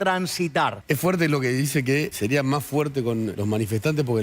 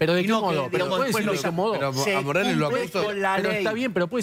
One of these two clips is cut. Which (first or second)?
first